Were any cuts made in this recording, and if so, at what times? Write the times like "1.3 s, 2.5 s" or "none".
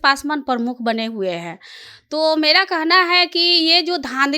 none